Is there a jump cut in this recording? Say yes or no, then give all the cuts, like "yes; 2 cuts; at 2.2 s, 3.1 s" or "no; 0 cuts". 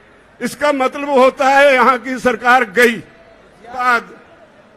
yes; 1 cut; at 3.8 s